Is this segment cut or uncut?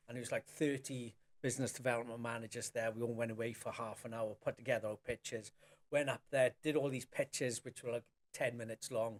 uncut